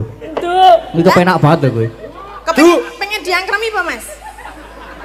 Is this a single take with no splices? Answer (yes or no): yes